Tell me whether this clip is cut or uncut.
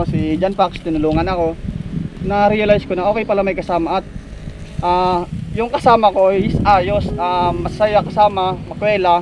cut